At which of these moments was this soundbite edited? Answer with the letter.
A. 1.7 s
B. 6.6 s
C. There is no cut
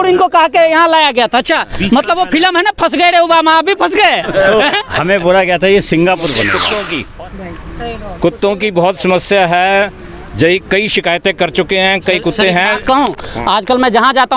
B